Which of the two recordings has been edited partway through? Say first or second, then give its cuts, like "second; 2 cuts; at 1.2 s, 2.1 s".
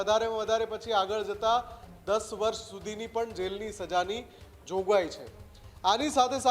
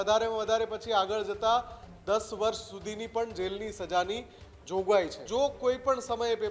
second; 1 cut; at 5.2 s